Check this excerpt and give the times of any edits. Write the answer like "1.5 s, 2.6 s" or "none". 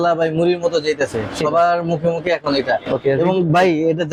none